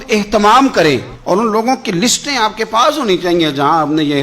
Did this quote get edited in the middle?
yes; 1 cut; at 1.1 s

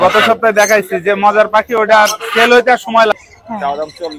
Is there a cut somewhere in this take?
yes; 1 cut; at 3.1 s

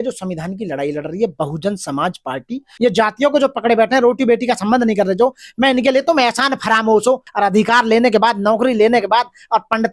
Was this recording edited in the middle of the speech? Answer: yes; 2 cuts; at 2.6 s, 7.3 s

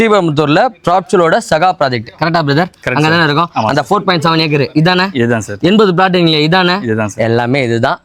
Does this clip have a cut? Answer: no; 0 cuts

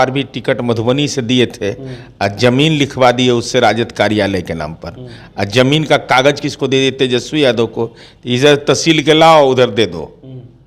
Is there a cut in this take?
no; 0 cuts

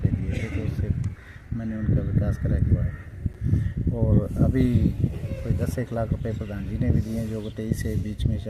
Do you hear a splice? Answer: no; 0 cuts

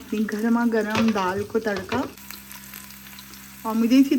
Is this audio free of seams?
no; 1 cut; at 2.2 s

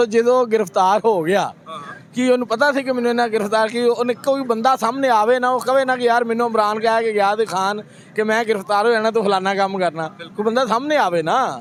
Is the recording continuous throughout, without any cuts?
yes; 0 cuts

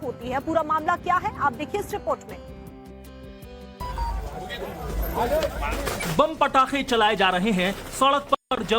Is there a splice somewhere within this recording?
yes; 1 cut; at 7.8 s

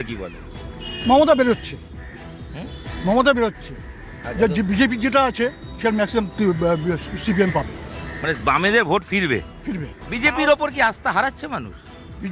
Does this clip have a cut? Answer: no; 0 cuts

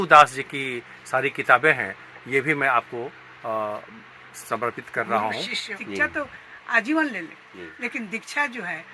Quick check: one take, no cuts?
no; 1 cut; at 5.8 s

